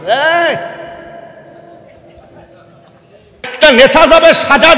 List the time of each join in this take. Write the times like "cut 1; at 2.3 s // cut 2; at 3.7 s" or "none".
cut 1; at 3.5 s